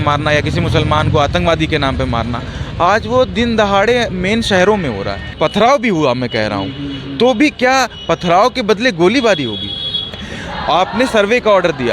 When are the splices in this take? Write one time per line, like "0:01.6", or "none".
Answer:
0:05.2
0:10.2

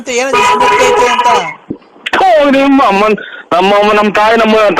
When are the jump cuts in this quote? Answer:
0:01.8

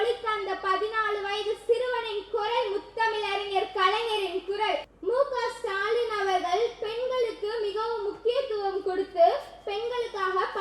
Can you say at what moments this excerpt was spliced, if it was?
0:04.9

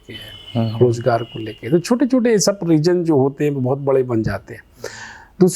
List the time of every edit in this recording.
none

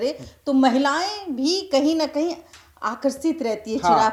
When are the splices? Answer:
none

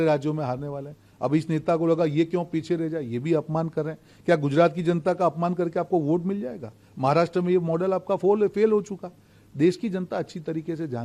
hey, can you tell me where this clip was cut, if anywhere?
none

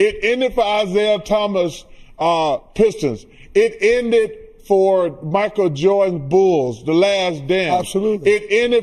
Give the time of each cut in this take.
none

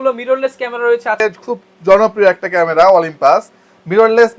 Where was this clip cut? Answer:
0:01.2

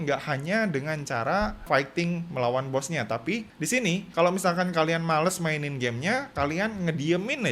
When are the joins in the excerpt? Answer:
0:01.7

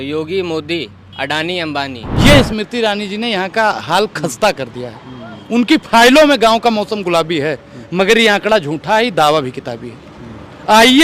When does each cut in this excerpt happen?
0:02.0

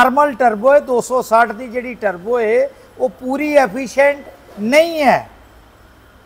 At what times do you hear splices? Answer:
none

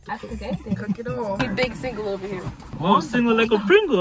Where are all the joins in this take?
0:01.4
0:02.6

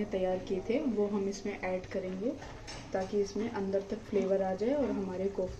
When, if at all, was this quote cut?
none

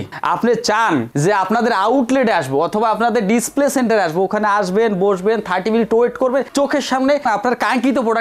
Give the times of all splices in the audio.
0:07.2

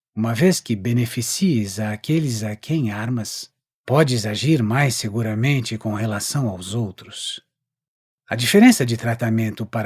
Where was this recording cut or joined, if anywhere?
0:01.9

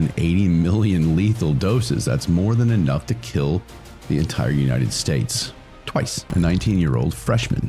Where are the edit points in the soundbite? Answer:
0:06.2

